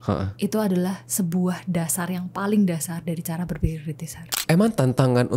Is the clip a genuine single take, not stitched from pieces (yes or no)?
no